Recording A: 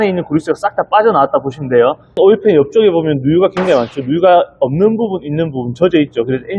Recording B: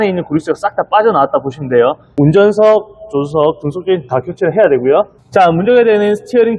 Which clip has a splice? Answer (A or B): A